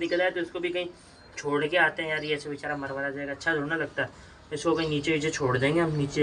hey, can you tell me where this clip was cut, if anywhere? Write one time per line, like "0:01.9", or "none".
none